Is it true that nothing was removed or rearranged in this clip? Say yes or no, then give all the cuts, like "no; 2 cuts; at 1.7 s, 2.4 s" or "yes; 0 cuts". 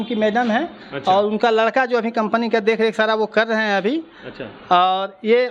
yes; 0 cuts